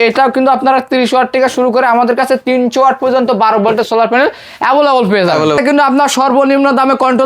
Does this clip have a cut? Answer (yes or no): yes